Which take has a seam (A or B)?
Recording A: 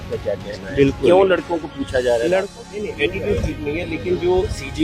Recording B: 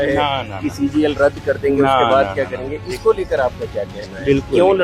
A